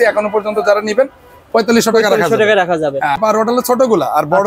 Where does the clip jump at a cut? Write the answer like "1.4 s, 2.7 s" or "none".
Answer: 3.2 s